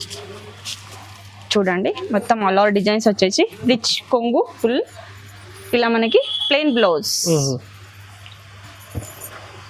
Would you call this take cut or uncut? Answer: uncut